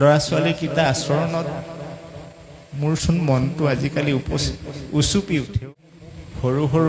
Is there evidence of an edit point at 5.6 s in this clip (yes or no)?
yes